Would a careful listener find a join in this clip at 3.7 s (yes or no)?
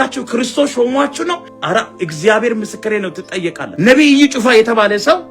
yes